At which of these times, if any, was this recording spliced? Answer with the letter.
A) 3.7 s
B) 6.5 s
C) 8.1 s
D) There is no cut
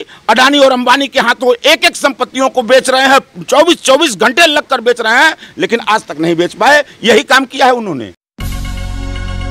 C